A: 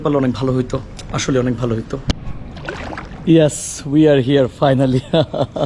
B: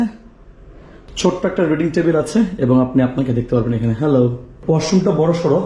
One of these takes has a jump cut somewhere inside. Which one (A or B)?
B